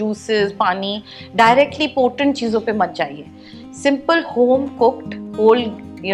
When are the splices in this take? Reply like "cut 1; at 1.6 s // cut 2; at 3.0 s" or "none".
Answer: none